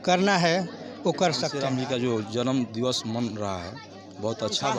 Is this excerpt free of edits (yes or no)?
no